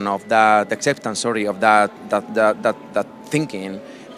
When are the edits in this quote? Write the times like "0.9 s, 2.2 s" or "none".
none